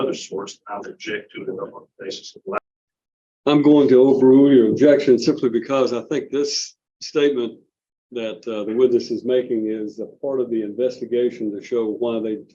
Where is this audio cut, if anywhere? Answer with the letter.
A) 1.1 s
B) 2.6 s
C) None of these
B